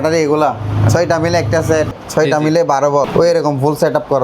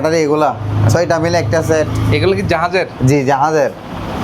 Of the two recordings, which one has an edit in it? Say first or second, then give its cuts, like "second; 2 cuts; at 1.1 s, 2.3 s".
first; 2 cuts; at 2.0 s, 3.1 s